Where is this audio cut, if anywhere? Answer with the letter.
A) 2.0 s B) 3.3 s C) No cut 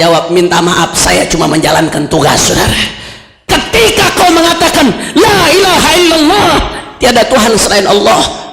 B